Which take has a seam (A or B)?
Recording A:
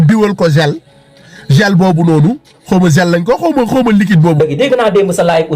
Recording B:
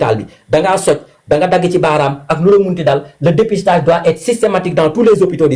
A